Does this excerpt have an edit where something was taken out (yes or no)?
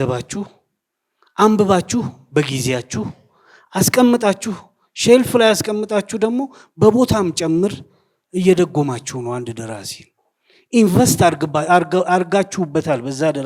no